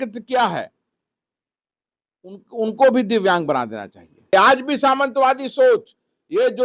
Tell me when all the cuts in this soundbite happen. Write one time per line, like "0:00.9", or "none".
0:04.3